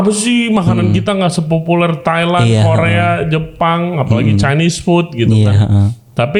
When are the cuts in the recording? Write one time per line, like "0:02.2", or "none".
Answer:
none